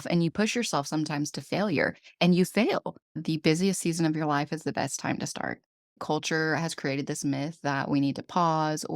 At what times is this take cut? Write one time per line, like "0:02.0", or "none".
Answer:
0:03.2
0:06.0